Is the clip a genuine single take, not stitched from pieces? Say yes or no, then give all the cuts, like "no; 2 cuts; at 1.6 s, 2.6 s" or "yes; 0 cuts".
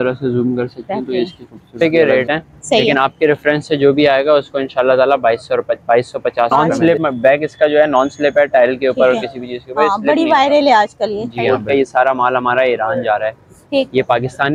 no; 3 cuts; at 1.8 s, 6.5 s, 11.4 s